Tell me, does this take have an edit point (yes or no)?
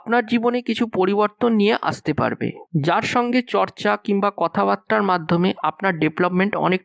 no